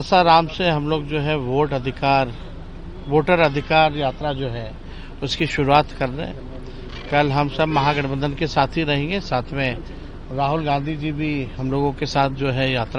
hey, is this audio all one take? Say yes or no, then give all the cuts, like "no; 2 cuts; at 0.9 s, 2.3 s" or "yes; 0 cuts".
yes; 0 cuts